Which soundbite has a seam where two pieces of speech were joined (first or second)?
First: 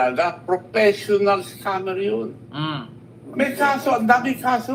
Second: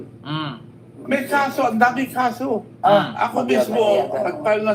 second